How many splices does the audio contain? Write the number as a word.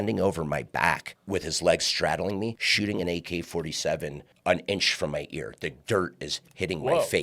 three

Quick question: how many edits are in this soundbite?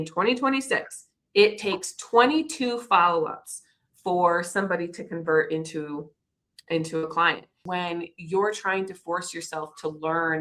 one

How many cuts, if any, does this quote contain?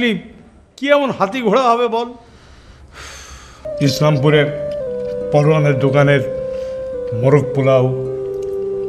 one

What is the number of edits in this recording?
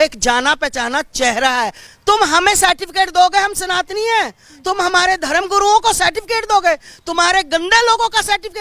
one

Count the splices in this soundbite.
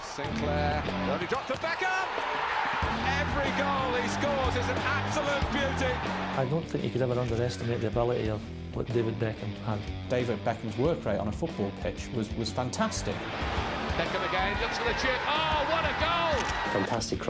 zero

